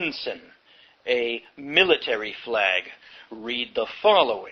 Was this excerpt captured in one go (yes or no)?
yes